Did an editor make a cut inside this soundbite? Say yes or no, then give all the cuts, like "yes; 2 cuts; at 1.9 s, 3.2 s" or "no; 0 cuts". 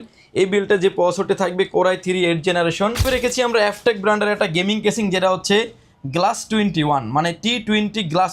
yes; 1 cut; at 3.1 s